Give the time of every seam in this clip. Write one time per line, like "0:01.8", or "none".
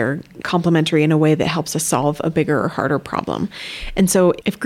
none